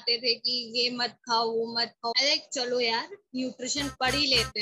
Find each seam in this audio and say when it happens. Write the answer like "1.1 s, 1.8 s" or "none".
none

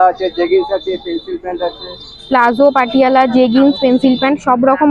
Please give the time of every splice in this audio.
none

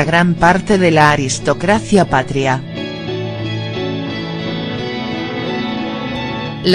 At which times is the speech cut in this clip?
4.2 s

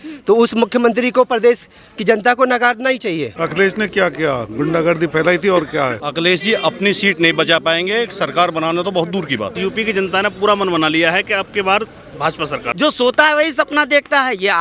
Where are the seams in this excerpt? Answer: 3.3 s, 6.0 s, 9.6 s, 12.6 s

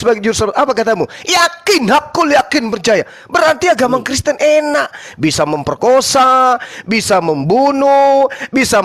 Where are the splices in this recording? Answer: none

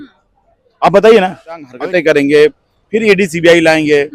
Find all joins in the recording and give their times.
1.7 s

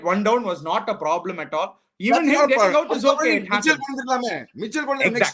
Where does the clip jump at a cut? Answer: none

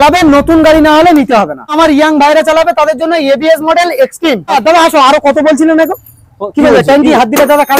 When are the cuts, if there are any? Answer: 1.7 s, 4.5 s

